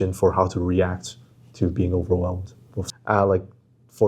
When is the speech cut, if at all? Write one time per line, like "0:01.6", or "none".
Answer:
0:02.8